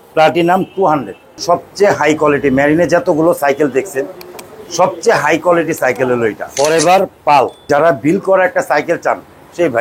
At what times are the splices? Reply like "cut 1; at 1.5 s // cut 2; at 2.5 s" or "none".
cut 1; at 1.4 s // cut 2; at 6.5 s // cut 3; at 7.7 s